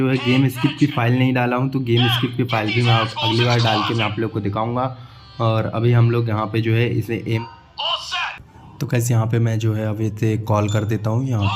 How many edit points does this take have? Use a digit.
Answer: 1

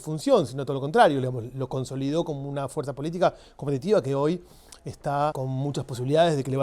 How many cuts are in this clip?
1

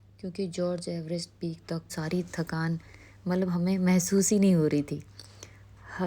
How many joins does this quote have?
1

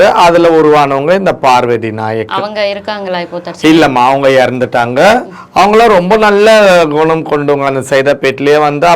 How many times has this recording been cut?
0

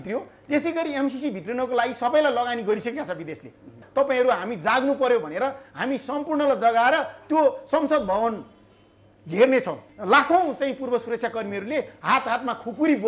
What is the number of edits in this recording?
2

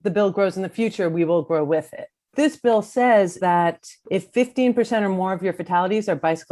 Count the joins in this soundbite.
2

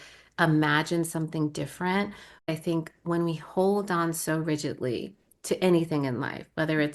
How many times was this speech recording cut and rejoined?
1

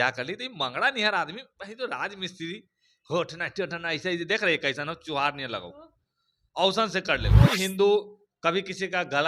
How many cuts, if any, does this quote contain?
1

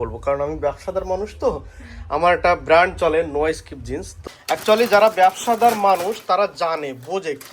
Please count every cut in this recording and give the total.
1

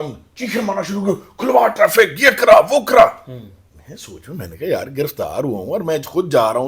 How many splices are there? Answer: 0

